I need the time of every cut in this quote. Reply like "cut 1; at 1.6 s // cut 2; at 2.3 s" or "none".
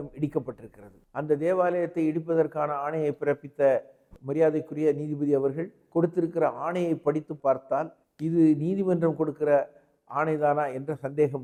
none